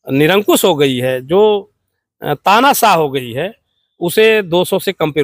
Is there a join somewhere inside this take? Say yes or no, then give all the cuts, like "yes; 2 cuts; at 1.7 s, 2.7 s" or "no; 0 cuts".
no; 0 cuts